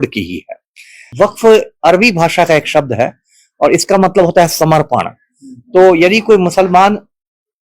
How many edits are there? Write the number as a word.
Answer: one